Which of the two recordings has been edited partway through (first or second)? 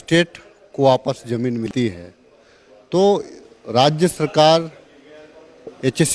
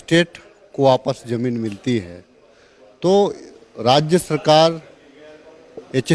first